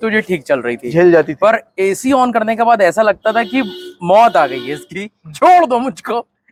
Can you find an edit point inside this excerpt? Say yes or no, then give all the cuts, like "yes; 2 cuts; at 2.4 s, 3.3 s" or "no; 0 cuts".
no; 0 cuts